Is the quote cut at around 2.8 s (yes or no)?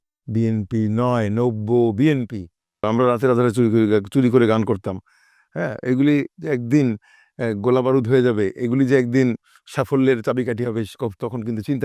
yes